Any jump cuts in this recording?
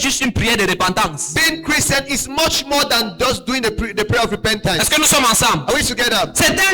no; 0 cuts

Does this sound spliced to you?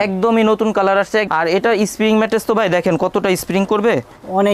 yes; 1 cut; at 1.3 s

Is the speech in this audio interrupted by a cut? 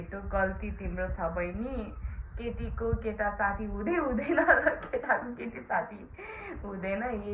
no; 0 cuts

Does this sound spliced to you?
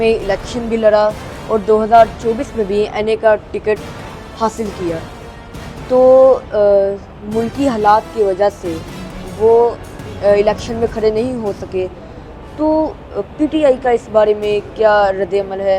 no; 0 cuts

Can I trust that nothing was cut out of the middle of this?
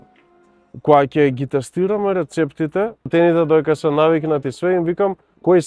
no; 1 cut; at 3.1 s

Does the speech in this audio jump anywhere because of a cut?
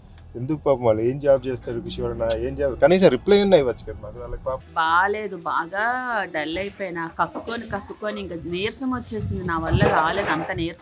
yes; 1 cut; at 4.6 s

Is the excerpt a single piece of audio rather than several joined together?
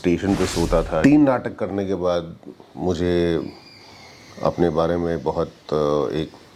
no; 1 cut; at 1.0 s

